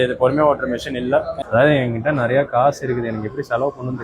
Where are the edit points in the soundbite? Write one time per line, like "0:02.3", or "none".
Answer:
0:01.3

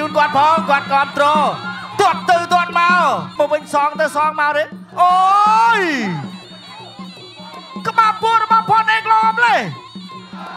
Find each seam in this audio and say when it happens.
0:03.3

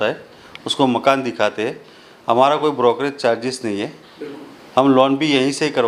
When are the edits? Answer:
none

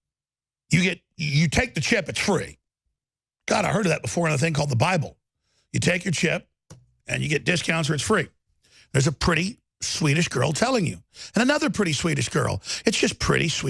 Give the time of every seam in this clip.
none

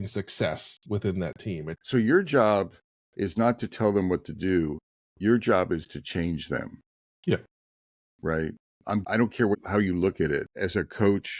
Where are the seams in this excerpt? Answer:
0:01.8
0:09.1
0:10.5

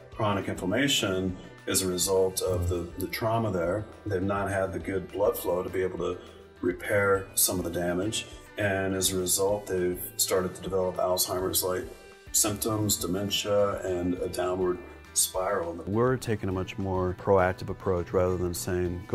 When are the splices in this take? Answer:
0:15.9
0:17.2

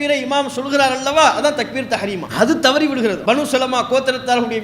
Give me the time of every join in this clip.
0:02.2
0:03.2

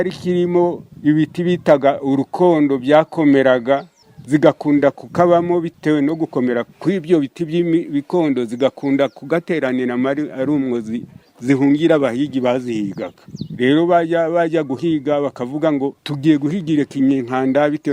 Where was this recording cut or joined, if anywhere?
none

